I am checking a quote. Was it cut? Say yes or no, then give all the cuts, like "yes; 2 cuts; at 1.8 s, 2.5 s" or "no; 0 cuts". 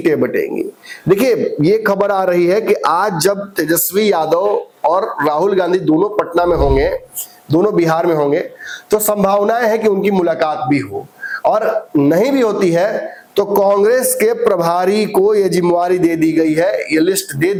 no; 0 cuts